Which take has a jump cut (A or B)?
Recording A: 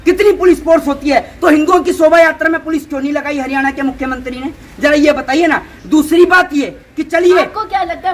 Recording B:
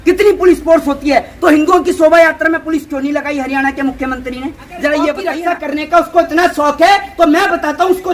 B